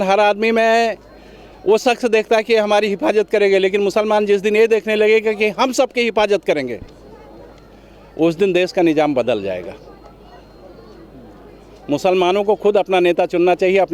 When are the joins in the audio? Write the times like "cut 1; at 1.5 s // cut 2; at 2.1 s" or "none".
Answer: none

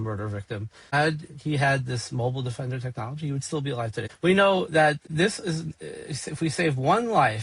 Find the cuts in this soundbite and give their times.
cut 1; at 0.9 s // cut 2; at 4.1 s

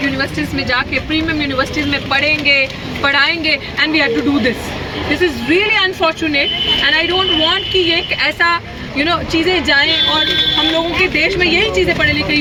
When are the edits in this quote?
none

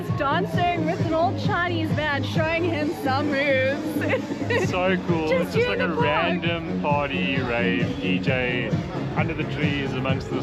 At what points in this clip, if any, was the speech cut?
none

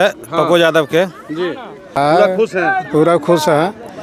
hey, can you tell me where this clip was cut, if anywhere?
cut 1; at 2.0 s

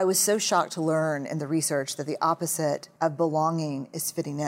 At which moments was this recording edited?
cut 1; at 2.9 s

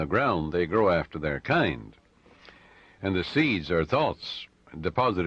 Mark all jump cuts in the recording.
cut 1; at 3.9 s

